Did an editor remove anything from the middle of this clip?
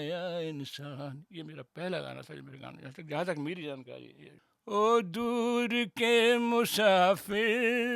yes; 1 cut; at 4.6 s

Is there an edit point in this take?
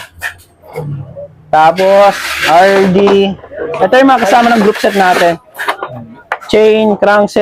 no; 0 cuts

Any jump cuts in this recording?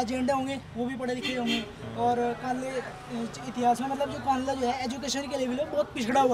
no; 0 cuts

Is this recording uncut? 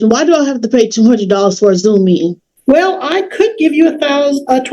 no; 1 cut; at 2.5 s

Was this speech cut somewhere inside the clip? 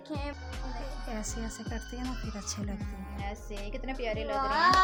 no; 0 cuts

